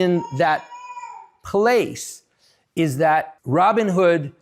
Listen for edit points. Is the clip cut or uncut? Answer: cut